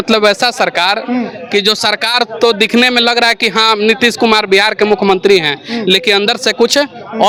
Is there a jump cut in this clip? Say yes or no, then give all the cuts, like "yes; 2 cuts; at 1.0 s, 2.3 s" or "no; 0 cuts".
no; 0 cuts